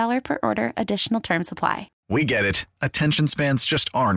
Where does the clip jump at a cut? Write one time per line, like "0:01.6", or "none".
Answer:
0:01.9